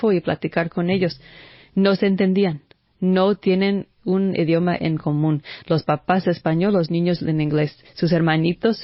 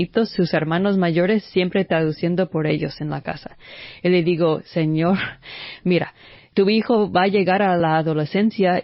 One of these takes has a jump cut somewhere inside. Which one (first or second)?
second